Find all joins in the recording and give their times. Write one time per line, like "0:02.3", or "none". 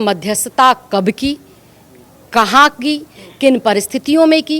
none